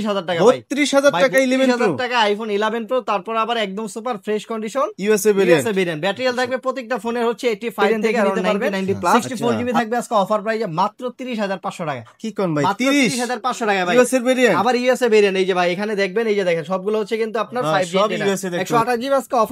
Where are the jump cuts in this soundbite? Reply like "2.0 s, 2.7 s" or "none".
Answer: 9.2 s, 18.6 s